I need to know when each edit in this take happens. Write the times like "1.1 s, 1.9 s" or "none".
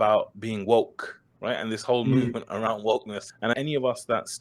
3.5 s